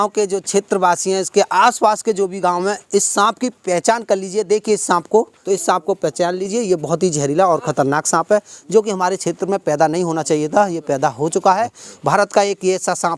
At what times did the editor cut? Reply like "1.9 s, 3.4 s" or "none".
5.4 s, 11.8 s